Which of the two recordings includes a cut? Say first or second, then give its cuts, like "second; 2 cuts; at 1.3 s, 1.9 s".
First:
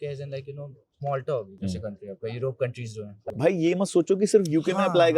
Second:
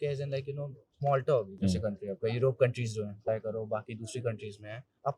first; 1 cut; at 3.2 s